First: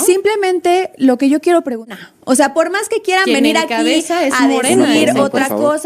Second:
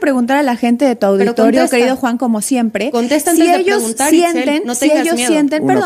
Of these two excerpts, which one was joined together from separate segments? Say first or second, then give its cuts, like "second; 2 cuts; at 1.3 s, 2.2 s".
first; 1 cut; at 1.9 s